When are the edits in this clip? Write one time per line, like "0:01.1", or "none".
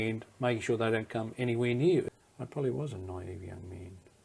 0:02.1